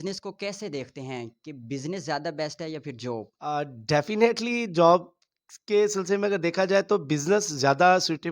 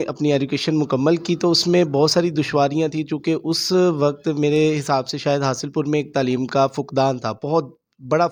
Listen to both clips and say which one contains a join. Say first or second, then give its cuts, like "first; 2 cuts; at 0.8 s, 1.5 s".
first; 1 cut; at 3.4 s